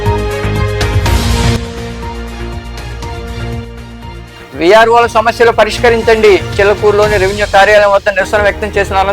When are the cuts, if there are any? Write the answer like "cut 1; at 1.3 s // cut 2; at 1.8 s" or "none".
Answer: cut 1; at 0.9 s